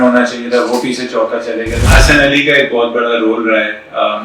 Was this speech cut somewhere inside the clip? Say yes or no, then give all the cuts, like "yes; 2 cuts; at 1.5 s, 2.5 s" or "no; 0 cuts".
yes; 1 cut; at 1.8 s